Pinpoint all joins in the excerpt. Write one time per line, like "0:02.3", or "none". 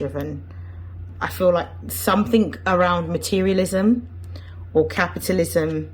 0:01.1